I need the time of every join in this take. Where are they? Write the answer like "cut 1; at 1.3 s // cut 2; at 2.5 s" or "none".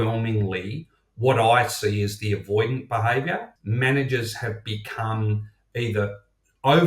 cut 1; at 3.5 s

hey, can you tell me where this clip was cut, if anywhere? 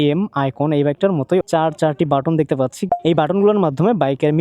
cut 1; at 1.0 s // cut 2; at 2.8 s

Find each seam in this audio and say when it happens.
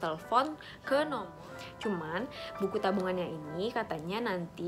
cut 1; at 1.3 s

